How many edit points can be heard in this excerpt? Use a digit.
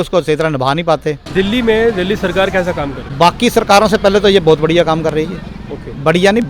2